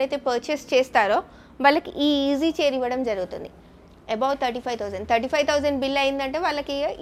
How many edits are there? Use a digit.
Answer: 0